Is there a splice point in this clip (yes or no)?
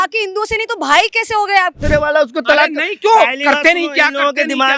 yes